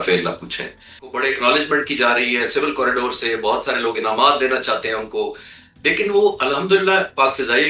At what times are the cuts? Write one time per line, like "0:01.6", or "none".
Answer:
0:01.2